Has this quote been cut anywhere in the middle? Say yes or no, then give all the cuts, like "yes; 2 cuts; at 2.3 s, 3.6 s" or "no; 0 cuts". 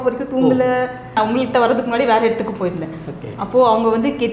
yes; 1 cut; at 1.2 s